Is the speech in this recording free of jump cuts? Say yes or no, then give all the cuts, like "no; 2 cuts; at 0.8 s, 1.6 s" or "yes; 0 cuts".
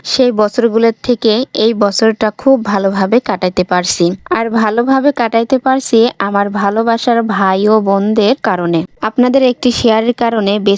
no; 1 cut; at 8.9 s